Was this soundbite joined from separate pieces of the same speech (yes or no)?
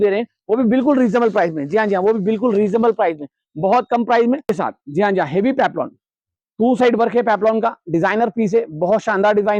yes